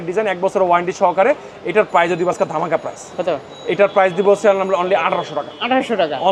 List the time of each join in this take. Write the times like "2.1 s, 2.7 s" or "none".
none